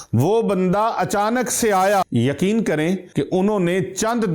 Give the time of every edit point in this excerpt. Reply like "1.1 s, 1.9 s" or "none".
2.0 s, 3.1 s